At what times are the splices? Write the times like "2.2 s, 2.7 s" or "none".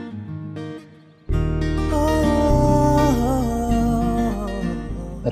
none

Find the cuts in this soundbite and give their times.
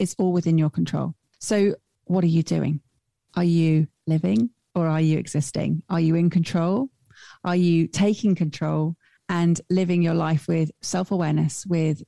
1.3 s, 1.9 s

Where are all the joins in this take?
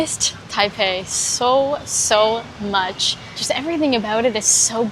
3.4 s

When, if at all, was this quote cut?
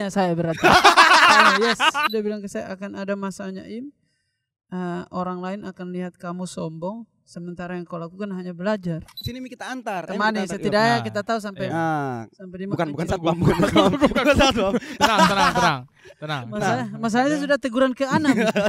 2.1 s, 9.2 s

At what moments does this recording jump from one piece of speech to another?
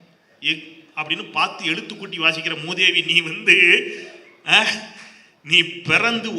none

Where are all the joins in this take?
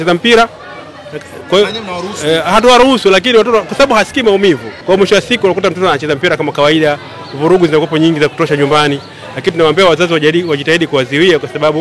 4.7 s

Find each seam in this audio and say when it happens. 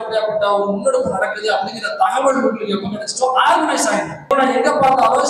4.3 s

